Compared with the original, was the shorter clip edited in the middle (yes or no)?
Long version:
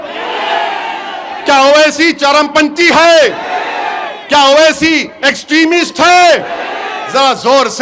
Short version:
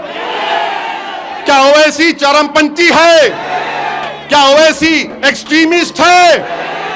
no